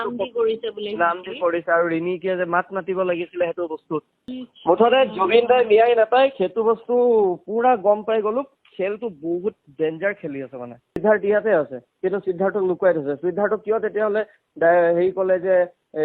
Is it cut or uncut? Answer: cut